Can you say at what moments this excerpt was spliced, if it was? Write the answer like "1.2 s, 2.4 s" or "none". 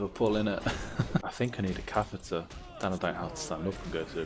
1.2 s